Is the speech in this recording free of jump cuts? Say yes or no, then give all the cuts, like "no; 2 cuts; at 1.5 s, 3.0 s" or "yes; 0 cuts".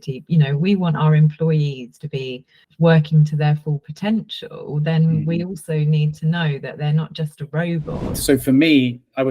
no; 2 cuts; at 2.6 s, 8.1 s